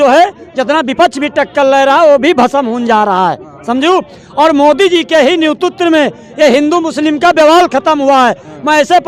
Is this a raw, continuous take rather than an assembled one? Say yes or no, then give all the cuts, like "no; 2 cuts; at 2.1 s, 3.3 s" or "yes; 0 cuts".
yes; 0 cuts